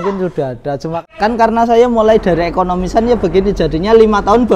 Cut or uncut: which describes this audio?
cut